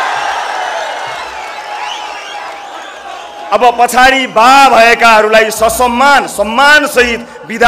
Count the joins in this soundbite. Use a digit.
0